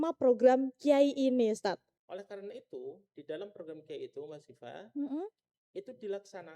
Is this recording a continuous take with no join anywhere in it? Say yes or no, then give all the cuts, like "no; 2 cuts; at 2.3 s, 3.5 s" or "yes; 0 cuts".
no; 1 cut; at 1.9 s